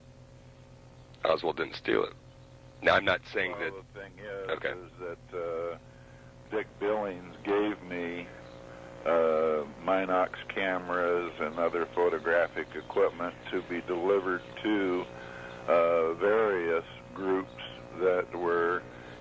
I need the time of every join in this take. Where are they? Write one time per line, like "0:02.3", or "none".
0:02.7